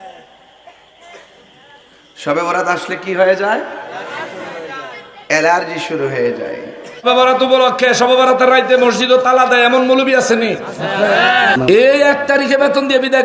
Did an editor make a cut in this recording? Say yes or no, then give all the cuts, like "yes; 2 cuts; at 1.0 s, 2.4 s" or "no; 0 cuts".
yes; 1 cut; at 7.0 s